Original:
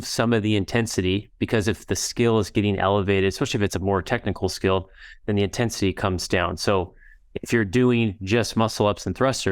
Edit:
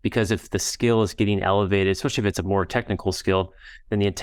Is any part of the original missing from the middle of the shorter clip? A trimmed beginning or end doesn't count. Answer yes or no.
no